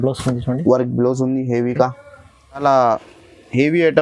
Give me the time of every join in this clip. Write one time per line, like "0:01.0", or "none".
0:02.6